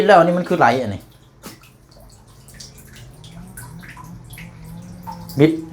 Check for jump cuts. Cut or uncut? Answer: uncut